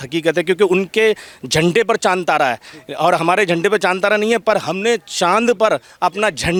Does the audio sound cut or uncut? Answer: uncut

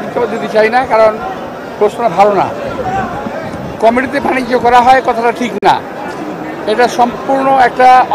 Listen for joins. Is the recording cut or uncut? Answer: uncut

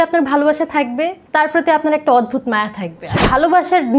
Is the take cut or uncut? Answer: cut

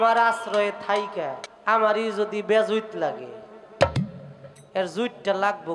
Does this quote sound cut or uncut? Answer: cut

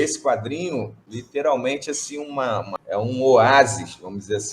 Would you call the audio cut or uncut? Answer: cut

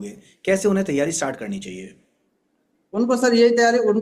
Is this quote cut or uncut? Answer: uncut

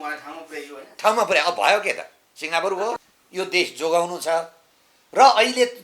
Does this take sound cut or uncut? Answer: cut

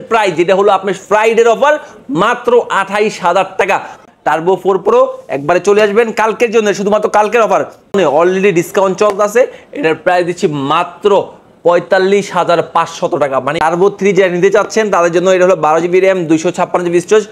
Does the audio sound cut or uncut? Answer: cut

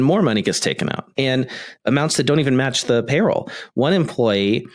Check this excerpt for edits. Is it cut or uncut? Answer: cut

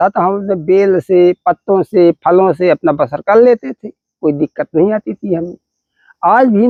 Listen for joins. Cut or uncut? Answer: uncut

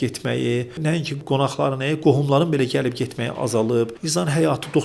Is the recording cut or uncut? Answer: cut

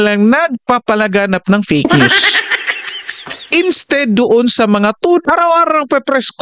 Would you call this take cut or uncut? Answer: cut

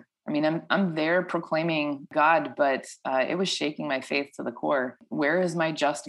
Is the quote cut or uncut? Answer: cut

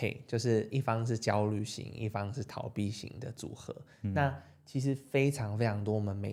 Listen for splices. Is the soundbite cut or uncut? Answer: uncut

